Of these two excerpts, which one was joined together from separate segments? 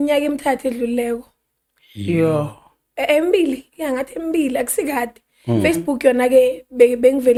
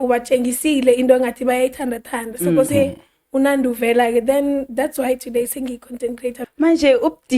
second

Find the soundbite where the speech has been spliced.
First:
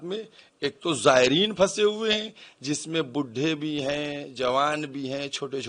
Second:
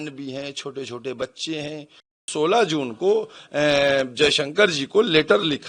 second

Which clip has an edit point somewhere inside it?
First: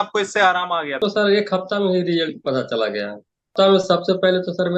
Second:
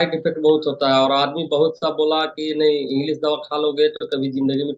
first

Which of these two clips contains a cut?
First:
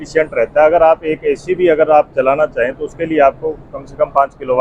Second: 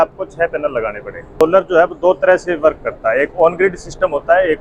second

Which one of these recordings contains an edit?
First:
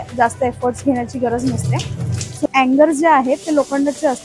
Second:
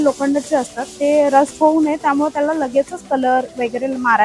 first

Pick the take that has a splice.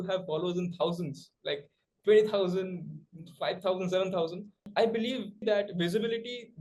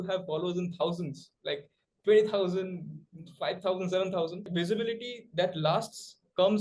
second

